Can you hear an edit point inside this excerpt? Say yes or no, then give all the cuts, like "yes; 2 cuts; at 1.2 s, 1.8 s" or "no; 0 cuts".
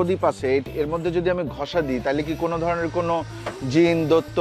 no; 0 cuts